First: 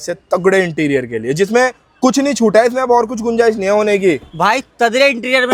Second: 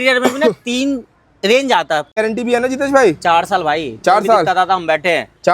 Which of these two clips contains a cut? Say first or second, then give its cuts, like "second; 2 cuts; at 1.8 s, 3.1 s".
second; 1 cut; at 2.1 s